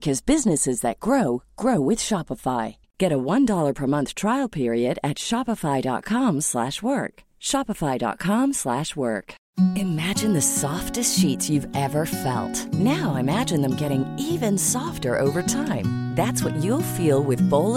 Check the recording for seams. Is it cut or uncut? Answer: cut